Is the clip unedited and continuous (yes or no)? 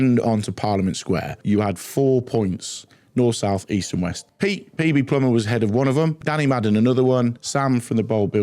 no